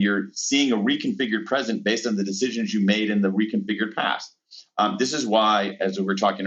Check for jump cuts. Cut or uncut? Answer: uncut